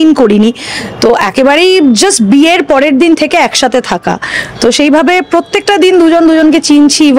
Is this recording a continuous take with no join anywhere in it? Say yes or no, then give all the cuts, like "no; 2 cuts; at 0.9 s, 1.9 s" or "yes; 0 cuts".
yes; 0 cuts